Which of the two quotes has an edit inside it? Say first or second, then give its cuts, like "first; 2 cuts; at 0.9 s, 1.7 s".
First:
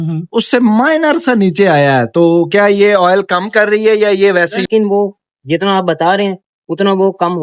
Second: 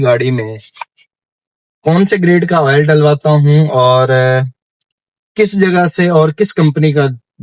first; 1 cut; at 4.6 s